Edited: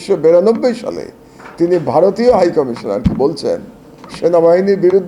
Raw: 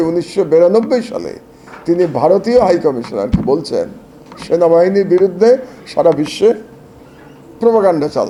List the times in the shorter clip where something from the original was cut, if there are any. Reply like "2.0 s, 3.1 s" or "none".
none